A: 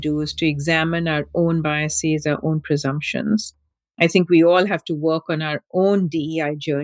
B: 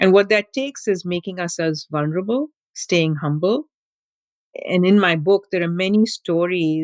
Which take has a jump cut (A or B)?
B